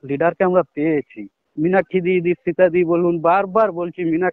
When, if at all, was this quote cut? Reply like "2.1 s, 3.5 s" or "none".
1.4 s